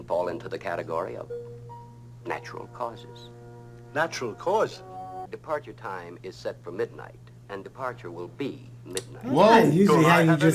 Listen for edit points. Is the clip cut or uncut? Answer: cut